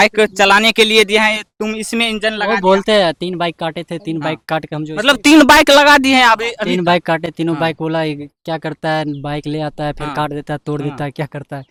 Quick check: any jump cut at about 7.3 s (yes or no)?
no